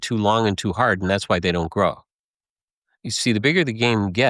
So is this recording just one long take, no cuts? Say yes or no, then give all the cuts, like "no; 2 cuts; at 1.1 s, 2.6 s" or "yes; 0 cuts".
yes; 0 cuts